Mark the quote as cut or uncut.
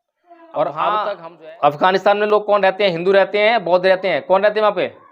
cut